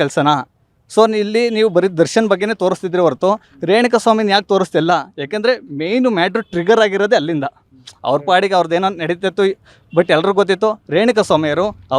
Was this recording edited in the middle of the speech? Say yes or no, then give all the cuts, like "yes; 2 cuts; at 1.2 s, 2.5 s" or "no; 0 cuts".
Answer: no; 0 cuts